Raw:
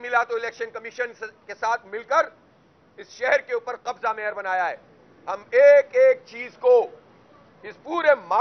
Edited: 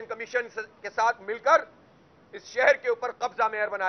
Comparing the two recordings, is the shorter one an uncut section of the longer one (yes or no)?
yes